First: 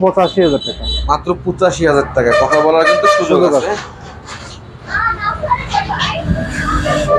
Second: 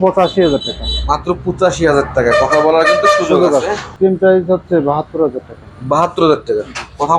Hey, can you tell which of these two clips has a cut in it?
second; 1 cut; at 3.9 s

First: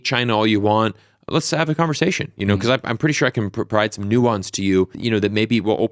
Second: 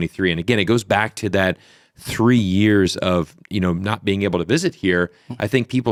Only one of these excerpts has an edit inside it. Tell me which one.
first; 1 cut; at 5.0 s

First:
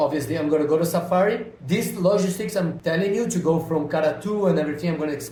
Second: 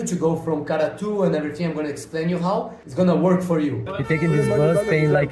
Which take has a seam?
second; 1 cut; at 3.9 s

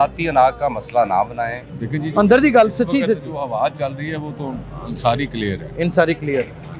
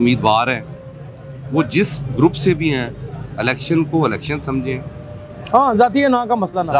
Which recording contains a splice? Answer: first; 1 cut; at 1.6 s

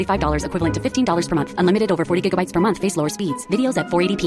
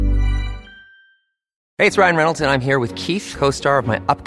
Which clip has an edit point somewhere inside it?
second; 1 cut; at 1.5 s

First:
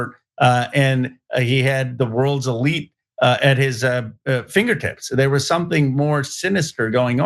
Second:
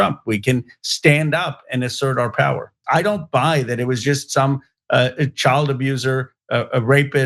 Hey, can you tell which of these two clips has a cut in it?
second; 1 cut; at 2.7 s

